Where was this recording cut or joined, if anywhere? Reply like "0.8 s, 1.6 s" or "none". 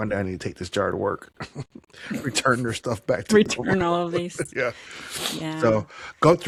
none